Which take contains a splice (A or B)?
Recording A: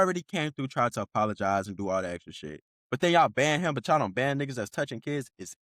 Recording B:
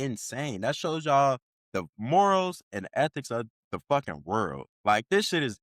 B